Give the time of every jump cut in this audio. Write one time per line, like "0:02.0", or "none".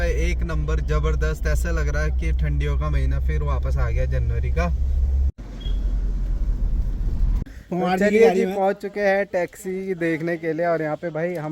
0:05.4
0:07.4